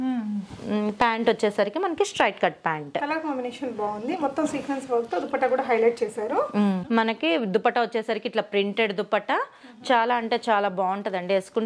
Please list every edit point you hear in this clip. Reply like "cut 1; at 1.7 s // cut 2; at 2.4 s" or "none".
cut 1; at 6.8 s